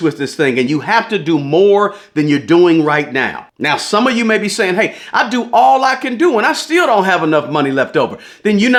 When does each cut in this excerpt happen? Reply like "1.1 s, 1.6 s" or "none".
none